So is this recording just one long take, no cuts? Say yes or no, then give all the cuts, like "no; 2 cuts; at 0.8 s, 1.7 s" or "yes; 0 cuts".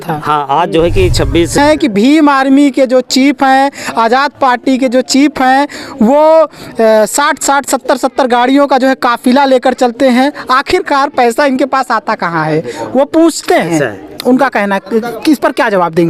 no; 1 cut; at 1.6 s